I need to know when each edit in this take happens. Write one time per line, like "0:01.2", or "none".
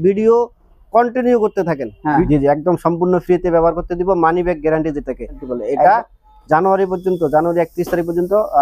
0:02.3
0:05.4